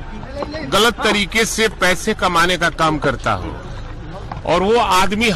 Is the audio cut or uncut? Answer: uncut